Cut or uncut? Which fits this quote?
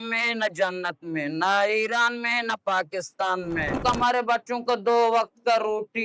cut